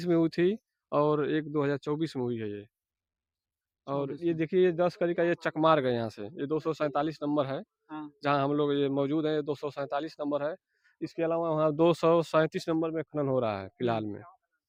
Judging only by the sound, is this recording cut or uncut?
uncut